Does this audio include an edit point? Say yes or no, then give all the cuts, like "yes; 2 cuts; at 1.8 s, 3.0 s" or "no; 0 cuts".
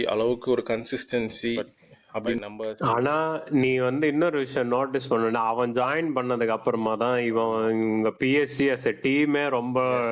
yes; 1 cut; at 2.4 s